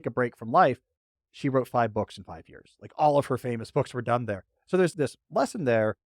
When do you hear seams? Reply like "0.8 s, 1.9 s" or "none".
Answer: 4.9 s